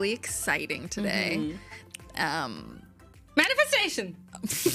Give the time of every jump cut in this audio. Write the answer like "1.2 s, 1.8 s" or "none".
none

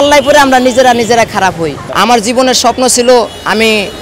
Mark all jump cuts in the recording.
1.9 s

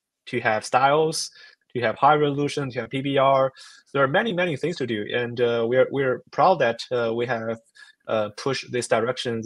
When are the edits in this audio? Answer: none

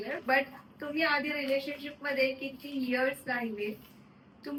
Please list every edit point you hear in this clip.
none

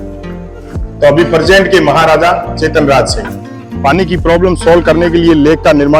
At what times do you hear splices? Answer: 3.6 s

